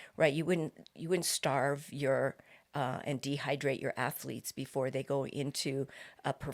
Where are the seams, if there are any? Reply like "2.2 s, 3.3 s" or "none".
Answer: none